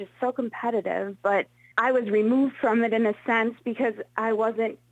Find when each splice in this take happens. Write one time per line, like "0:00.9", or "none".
0:01.6